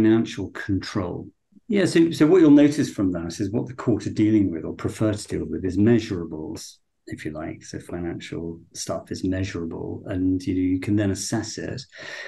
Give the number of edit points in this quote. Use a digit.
1